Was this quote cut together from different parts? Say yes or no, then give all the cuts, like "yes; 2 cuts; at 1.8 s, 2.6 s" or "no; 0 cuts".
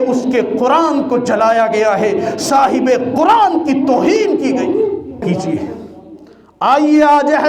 yes; 1 cut; at 5.2 s